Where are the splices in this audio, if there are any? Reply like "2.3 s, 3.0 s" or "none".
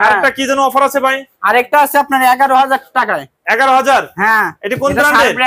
none